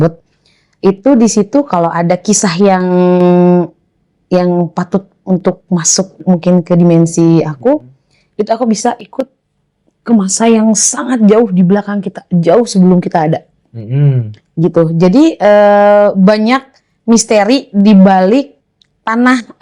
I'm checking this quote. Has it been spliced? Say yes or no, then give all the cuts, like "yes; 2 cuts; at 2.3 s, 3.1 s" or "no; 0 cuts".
no; 0 cuts